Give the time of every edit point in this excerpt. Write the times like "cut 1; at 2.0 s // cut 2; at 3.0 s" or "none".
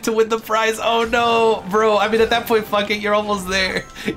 none